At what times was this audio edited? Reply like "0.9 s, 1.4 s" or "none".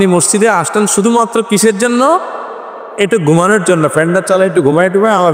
none